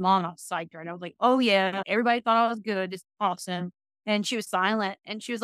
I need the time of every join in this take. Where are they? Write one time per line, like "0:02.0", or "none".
none